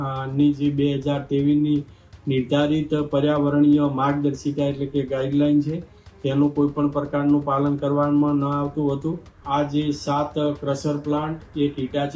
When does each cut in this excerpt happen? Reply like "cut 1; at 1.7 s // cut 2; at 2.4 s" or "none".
cut 1; at 9.3 s